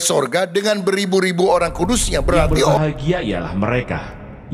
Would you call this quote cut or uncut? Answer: cut